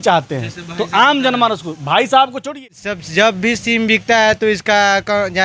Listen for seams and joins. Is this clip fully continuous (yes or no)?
no